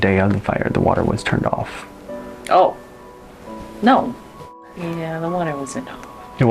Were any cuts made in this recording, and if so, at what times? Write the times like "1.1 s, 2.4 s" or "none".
4.6 s